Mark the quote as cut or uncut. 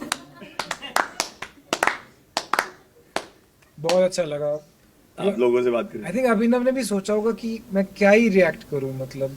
uncut